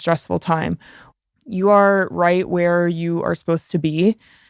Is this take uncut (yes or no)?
no